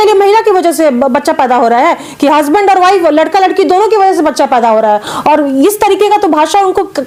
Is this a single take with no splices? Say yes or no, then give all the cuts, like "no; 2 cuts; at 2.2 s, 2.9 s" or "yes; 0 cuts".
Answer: yes; 0 cuts